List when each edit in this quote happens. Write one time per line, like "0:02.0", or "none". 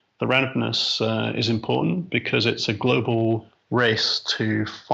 0:03.5